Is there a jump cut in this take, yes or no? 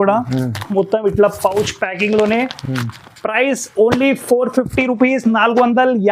no